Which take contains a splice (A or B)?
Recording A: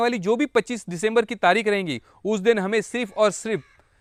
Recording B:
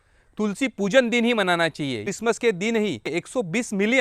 B